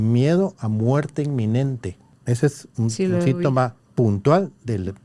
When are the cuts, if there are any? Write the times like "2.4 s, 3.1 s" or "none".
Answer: 2.1 s, 3.8 s